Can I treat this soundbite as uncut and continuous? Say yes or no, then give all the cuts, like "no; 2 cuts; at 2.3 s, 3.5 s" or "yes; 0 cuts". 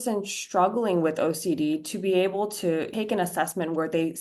no; 1 cut; at 2.9 s